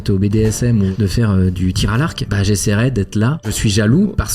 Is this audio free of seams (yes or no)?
no